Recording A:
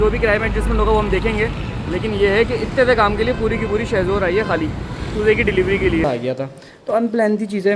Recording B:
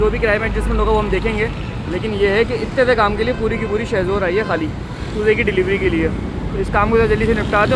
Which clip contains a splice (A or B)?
A